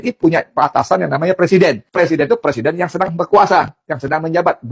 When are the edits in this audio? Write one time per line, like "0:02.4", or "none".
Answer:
0:01.8